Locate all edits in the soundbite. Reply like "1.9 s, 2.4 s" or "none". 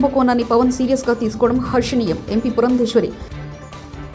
3.2 s